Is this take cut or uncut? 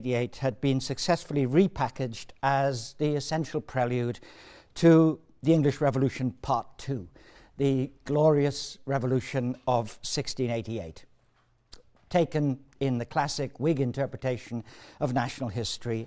cut